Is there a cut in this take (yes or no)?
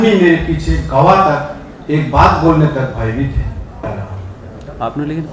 yes